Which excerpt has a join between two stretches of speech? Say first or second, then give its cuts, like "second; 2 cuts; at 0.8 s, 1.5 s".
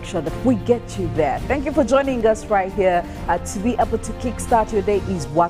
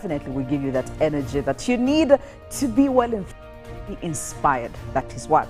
first; 1 cut; at 2.2 s